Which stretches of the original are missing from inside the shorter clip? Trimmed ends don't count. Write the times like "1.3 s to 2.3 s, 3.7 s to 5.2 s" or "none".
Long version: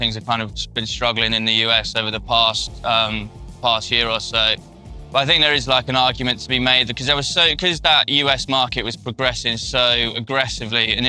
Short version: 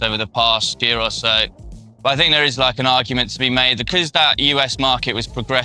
2.7 s to 3.9 s, 6.9 s to 7.5 s